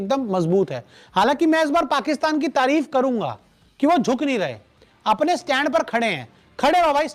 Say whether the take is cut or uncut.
uncut